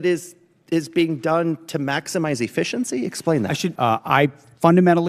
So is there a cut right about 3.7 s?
yes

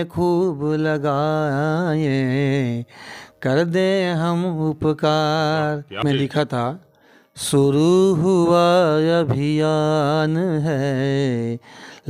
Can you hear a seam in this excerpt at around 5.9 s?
yes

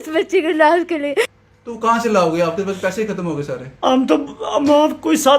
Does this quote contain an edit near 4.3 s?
no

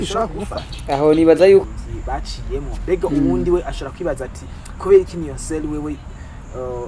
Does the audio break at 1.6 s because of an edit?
yes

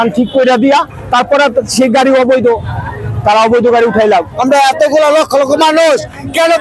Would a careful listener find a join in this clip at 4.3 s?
yes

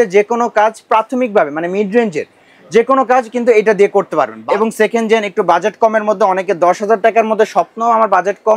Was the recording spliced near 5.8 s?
no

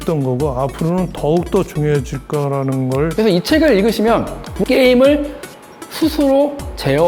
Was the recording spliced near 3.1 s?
yes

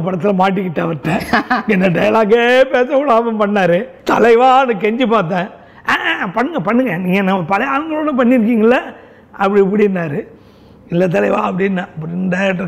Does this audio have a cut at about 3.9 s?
yes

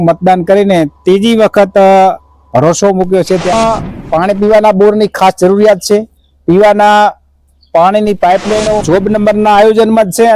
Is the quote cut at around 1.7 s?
no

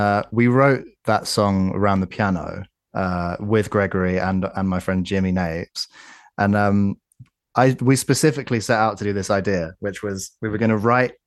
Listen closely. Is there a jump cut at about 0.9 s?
yes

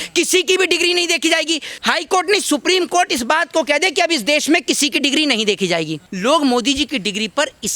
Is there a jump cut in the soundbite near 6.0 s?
yes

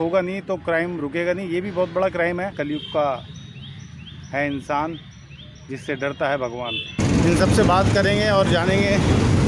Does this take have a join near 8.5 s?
no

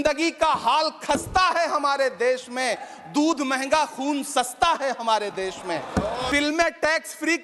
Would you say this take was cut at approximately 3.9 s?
no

